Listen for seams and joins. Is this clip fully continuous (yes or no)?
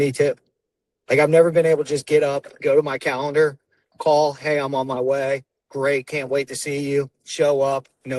yes